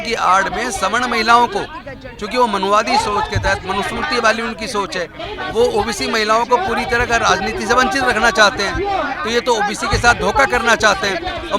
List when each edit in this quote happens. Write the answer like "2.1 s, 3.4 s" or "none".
none